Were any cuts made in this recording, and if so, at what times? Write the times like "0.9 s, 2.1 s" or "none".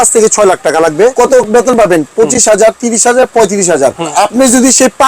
1.1 s, 4.1 s